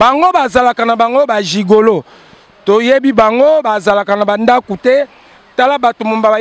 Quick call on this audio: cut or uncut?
uncut